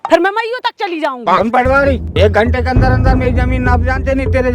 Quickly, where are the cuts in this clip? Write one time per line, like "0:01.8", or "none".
0:01.2